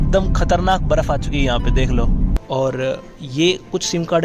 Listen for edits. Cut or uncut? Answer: cut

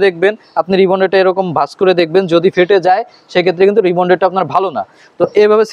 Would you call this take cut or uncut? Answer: uncut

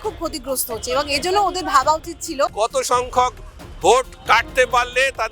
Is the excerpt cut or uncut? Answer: cut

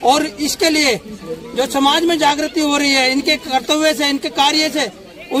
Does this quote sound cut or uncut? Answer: uncut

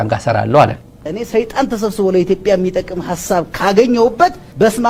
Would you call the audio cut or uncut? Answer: uncut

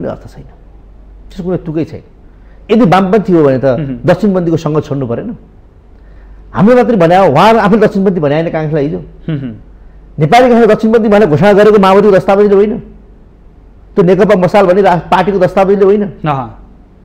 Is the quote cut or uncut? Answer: uncut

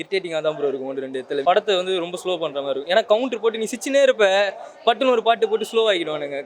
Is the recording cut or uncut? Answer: cut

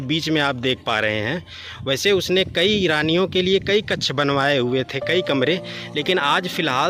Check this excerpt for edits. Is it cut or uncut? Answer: uncut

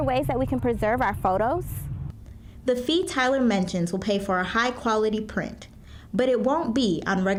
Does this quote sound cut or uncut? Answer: uncut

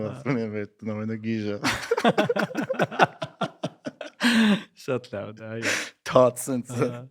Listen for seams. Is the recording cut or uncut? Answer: uncut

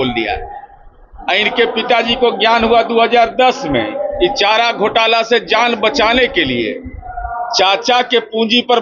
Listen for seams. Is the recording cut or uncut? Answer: uncut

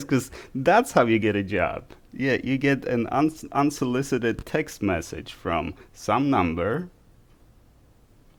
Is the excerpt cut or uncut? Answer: uncut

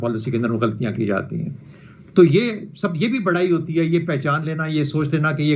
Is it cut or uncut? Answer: uncut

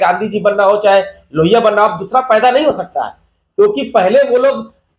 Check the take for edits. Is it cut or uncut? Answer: uncut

